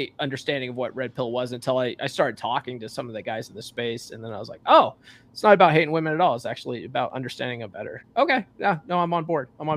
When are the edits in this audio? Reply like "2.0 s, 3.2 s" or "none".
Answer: none